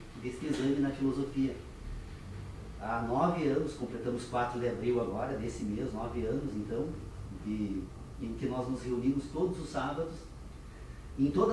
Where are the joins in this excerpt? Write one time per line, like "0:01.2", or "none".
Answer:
none